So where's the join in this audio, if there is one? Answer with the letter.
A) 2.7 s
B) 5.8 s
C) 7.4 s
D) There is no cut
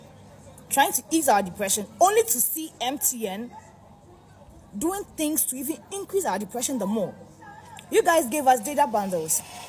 D